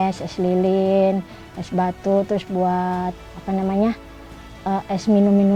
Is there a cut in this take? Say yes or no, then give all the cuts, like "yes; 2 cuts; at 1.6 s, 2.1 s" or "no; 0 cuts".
no; 0 cuts